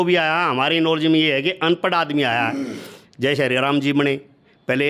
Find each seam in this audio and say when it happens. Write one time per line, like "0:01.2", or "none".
none